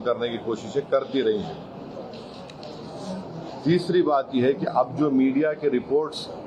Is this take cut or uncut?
uncut